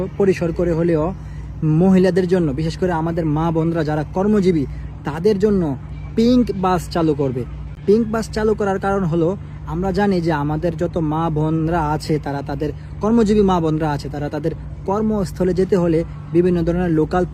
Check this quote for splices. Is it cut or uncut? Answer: uncut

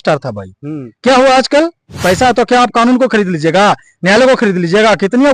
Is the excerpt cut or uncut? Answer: cut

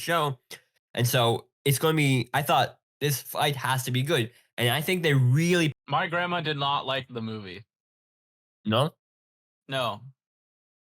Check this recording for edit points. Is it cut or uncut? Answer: cut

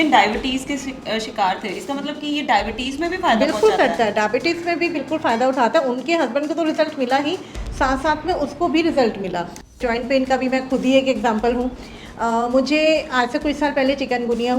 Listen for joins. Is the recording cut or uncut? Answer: cut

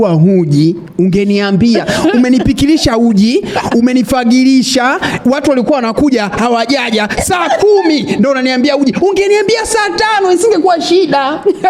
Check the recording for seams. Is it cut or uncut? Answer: uncut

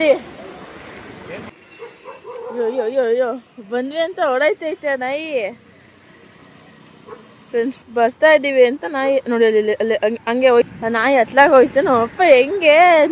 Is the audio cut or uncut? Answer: cut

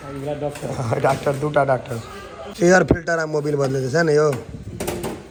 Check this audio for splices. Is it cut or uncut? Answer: uncut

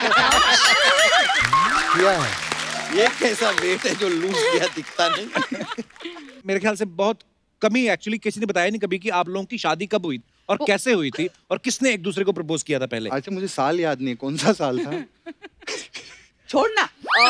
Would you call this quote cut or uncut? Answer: cut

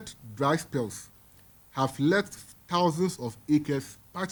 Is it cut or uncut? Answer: uncut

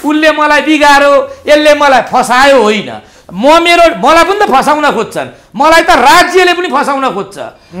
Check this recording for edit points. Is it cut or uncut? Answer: uncut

